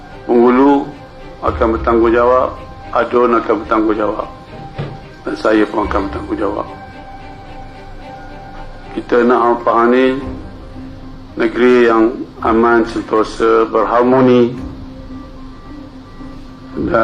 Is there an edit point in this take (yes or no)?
no